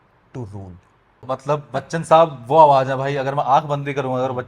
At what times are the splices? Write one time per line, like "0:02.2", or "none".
0:01.2